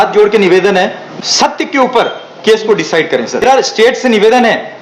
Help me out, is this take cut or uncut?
cut